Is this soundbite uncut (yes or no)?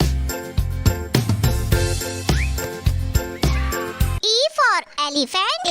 no